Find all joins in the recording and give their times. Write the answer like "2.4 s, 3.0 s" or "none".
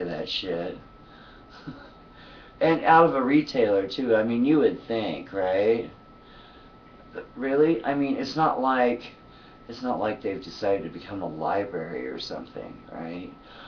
none